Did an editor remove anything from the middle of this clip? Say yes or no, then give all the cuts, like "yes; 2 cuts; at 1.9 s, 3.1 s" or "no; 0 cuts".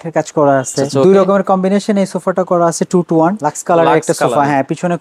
yes; 2 cuts; at 0.9 s, 3.4 s